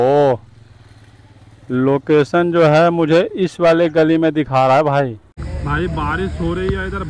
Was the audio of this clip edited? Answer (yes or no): yes